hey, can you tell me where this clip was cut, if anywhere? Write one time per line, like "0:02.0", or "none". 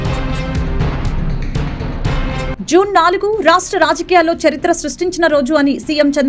none